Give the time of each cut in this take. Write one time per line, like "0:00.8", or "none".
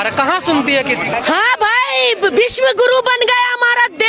0:01.1